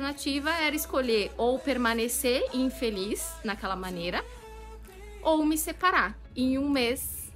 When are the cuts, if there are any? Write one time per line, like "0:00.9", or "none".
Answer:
0:06.3